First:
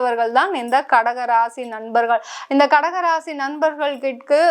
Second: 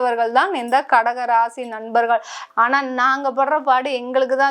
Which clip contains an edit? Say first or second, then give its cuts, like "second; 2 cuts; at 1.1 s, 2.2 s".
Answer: second; 1 cut; at 2.4 s